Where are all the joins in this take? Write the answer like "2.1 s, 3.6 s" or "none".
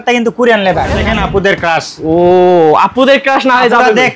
1.0 s